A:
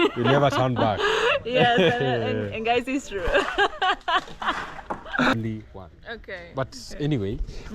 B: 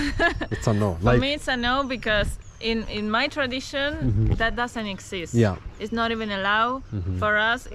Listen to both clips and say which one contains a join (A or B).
A